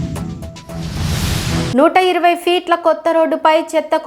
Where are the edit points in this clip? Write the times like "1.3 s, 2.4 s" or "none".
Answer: 1.7 s

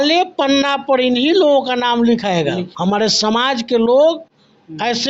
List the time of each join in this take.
2.7 s

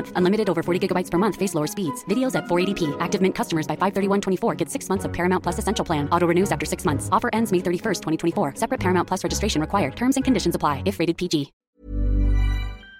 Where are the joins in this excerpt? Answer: 11.6 s

